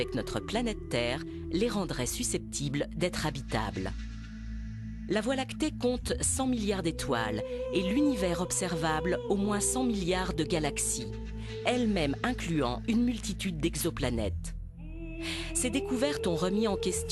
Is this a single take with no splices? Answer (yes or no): yes